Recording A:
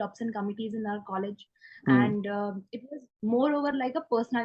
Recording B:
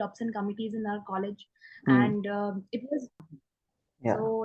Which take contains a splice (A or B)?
B